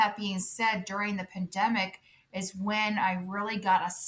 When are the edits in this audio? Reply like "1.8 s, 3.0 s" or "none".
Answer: none